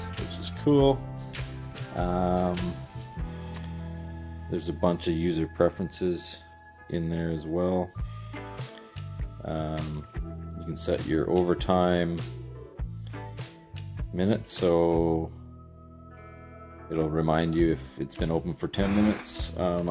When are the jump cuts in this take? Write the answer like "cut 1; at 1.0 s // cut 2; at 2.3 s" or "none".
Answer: cut 1; at 3.1 s // cut 2; at 4.3 s